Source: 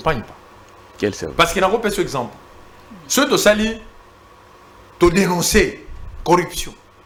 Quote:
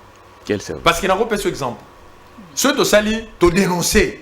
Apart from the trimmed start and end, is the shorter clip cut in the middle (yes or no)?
yes